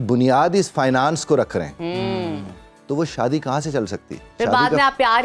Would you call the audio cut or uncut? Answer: uncut